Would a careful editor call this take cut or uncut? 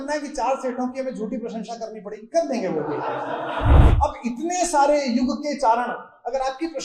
cut